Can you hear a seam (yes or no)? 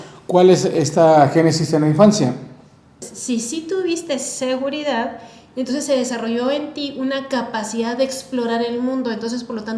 yes